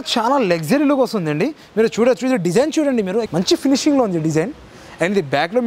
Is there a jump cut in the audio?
no; 0 cuts

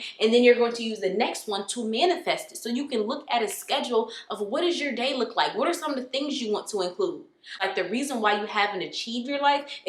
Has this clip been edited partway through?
yes; 1 cut; at 7.6 s

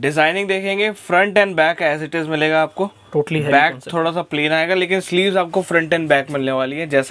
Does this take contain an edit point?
no; 0 cuts

